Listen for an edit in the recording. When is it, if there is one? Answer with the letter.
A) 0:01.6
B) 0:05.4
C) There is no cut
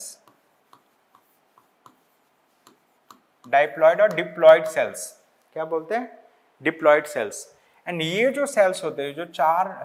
C